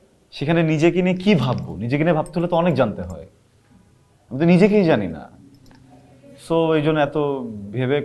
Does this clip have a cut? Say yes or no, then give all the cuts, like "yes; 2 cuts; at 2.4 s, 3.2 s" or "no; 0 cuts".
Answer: no; 0 cuts